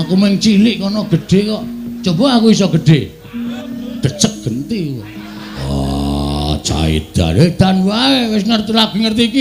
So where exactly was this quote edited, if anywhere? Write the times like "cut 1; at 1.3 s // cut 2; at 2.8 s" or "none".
cut 1; at 3.6 s // cut 2; at 5.6 s